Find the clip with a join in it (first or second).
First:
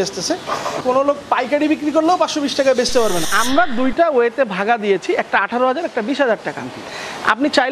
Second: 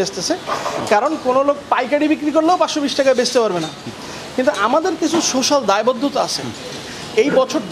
first